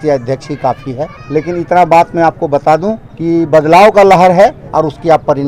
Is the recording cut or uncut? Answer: cut